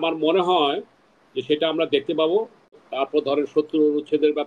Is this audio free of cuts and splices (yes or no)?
no